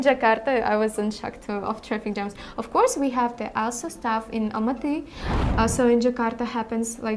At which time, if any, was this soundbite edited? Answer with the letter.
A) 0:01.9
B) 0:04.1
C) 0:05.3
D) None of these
C